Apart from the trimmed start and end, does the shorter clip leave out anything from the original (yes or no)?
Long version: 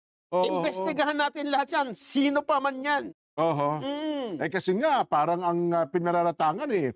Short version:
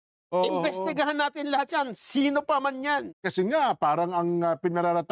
yes